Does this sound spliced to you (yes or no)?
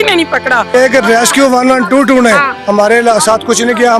yes